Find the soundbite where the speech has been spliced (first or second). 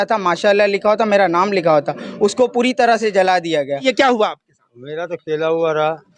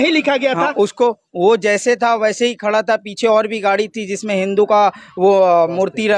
first